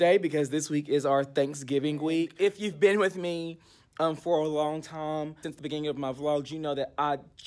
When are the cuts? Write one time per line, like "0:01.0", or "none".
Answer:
0:02.3
0:05.4